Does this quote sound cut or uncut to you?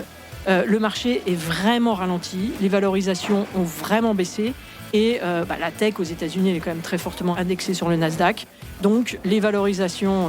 cut